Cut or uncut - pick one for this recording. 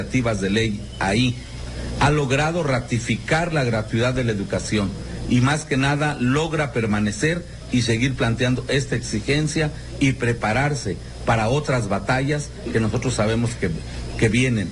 cut